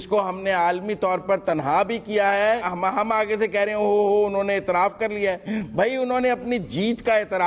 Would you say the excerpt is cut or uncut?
cut